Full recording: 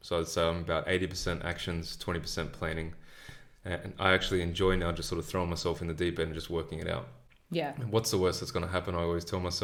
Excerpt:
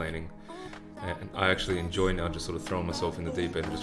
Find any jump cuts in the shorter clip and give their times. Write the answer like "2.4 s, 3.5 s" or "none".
none